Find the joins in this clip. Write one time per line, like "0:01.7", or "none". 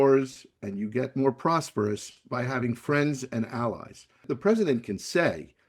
0:04.2